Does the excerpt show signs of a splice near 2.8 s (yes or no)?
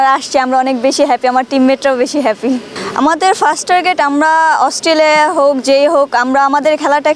yes